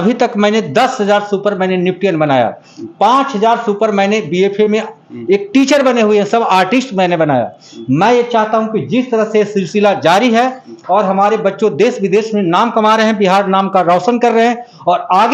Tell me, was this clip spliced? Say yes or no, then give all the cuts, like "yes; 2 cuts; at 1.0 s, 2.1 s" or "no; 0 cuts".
no; 0 cuts